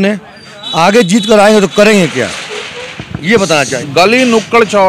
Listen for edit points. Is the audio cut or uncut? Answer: cut